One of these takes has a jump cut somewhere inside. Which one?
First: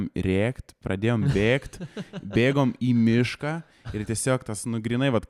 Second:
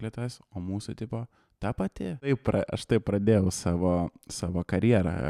second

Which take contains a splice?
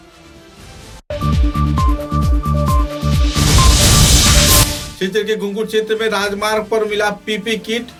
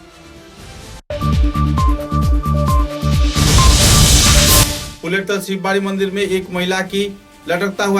second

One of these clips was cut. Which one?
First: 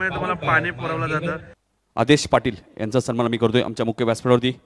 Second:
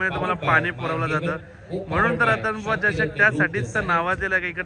first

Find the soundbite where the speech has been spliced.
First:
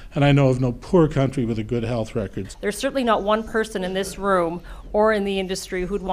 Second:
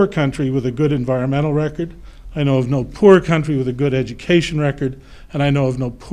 first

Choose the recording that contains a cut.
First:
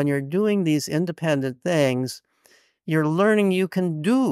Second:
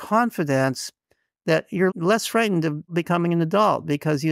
second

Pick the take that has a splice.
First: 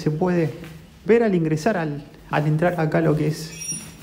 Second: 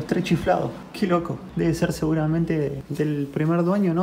second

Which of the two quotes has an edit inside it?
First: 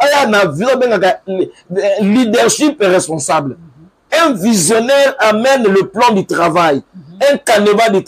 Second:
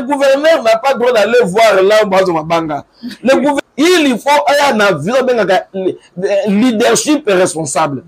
second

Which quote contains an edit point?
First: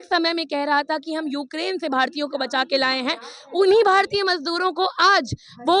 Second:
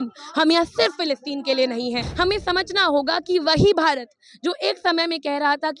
second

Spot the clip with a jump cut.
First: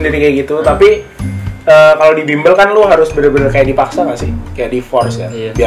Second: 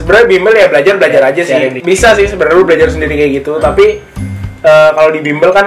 second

